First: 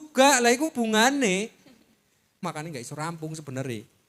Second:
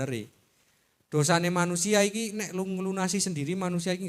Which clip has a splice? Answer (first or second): first